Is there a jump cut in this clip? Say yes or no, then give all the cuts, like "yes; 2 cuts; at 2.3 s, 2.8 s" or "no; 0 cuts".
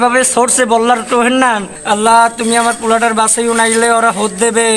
no; 0 cuts